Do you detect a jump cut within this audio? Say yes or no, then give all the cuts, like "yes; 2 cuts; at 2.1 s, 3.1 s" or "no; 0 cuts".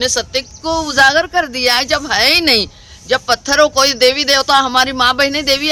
no; 0 cuts